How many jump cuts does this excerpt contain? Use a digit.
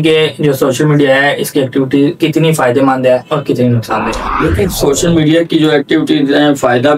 0